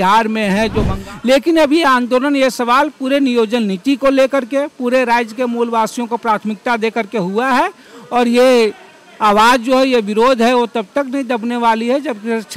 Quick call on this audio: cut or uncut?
cut